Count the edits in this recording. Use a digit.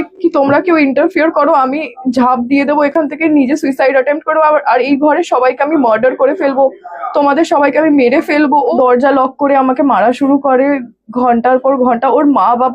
1